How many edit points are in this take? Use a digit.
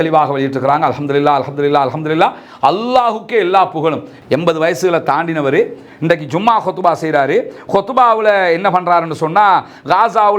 1